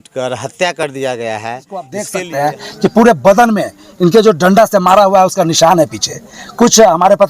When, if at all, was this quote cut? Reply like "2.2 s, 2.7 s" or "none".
2.1 s